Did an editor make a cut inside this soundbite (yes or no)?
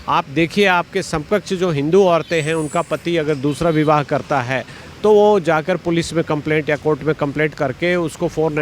no